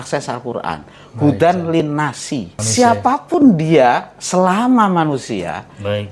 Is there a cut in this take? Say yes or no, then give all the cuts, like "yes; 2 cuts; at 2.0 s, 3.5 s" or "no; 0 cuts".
yes; 1 cut; at 2.6 s